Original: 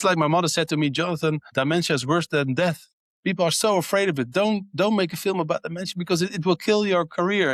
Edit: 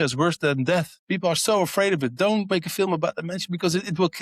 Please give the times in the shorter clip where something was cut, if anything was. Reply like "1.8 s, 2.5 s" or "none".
1.0 s, 2.5 s

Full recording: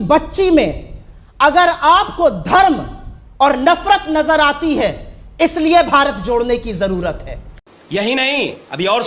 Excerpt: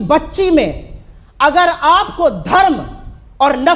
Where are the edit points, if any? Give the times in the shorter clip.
none

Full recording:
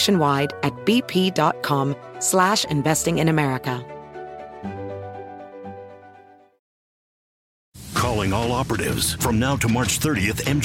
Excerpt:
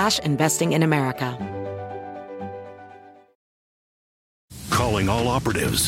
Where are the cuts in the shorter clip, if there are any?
1.3 s

